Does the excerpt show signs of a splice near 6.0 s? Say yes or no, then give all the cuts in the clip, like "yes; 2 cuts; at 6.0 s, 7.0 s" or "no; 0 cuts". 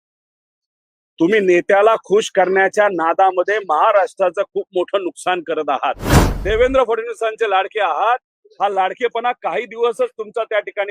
yes; 1 cut; at 6.0 s